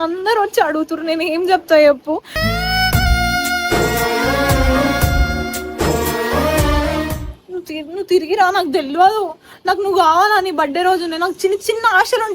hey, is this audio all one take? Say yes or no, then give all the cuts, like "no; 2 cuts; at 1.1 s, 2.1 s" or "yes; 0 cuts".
no; 1 cut; at 7.3 s